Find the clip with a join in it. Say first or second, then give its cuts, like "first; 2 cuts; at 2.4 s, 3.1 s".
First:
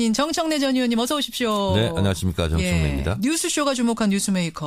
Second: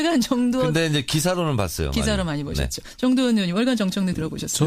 second; 1 cut; at 3.7 s